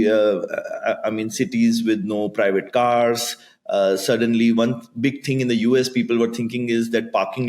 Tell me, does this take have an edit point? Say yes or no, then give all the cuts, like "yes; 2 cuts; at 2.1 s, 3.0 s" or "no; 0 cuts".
no; 0 cuts